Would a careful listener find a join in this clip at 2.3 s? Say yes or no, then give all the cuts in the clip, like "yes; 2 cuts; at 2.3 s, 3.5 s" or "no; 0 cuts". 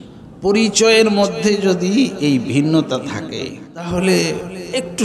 no; 1 cut; at 3.7 s